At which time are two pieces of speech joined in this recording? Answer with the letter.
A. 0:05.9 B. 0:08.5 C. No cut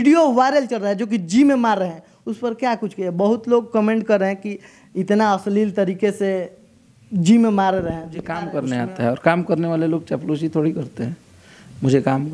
B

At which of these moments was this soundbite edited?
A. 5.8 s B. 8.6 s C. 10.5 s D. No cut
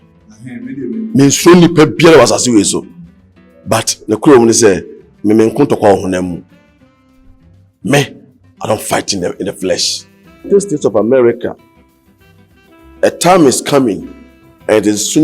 C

